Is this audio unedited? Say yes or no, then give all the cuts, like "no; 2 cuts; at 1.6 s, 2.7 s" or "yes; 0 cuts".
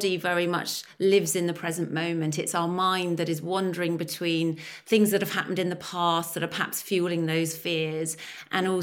yes; 0 cuts